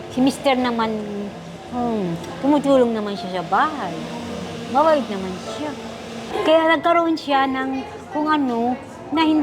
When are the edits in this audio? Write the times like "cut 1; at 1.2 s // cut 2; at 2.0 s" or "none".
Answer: cut 1; at 6.2 s